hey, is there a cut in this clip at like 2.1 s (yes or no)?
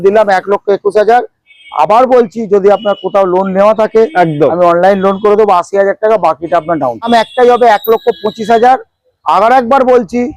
no